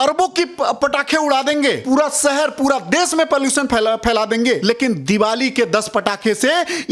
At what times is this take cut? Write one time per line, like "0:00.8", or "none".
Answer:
0:01.8
0:04.6